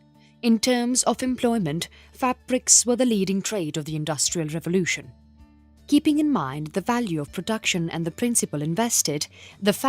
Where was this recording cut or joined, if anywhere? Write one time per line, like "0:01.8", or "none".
none